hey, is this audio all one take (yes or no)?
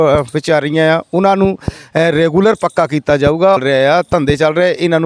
no